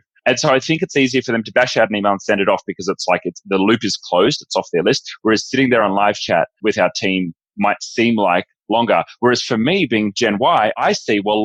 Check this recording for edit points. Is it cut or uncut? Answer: uncut